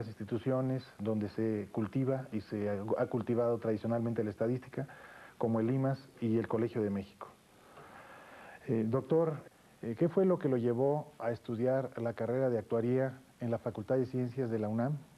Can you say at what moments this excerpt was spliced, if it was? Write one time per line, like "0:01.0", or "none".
0:09.5